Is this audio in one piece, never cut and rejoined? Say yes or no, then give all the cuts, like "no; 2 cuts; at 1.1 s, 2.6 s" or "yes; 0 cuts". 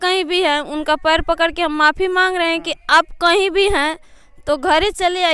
yes; 0 cuts